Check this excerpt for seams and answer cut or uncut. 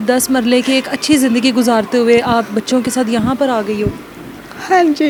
uncut